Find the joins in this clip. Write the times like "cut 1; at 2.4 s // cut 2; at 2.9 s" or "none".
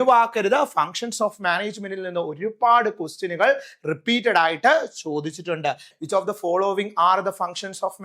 cut 1; at 5.9 s